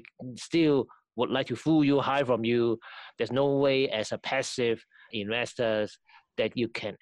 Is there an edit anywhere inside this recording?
yes; 1 cut; at 5.1 s

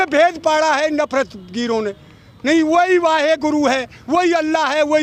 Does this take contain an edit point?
no; 0 cuts

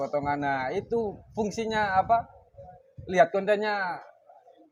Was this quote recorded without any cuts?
yes; 0 cuts

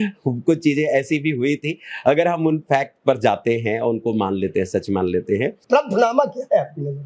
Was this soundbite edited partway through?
yes; 1 cut; at 5.6 s

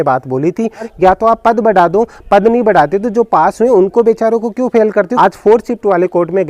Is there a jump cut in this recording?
yes; 2 cuts; at 0.9 s, 5.1 s

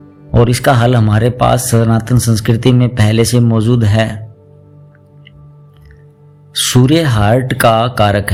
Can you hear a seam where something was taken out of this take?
no; 0 cuts

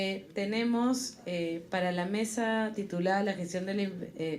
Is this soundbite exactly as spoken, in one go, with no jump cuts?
yes; 0 cuts

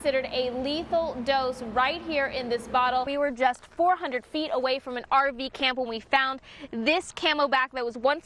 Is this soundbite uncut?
no; 1 cut; at 3.1 s

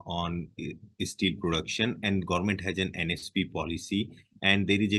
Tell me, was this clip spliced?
no; 0 cuts

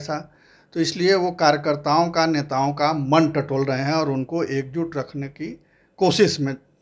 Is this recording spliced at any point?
no; 0 cuts

